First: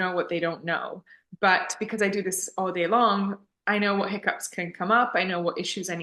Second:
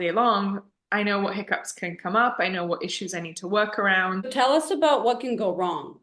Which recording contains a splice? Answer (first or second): second